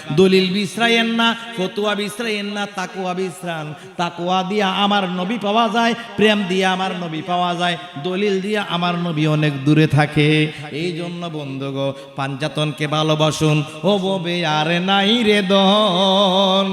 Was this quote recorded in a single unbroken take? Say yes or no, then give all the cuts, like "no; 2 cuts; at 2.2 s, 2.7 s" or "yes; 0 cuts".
yes; 0 cuts